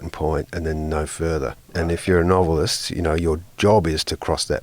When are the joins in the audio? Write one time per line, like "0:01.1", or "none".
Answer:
0:01.7